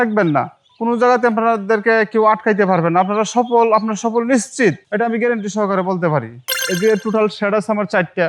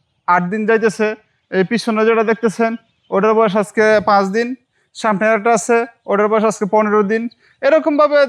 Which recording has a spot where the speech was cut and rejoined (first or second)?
first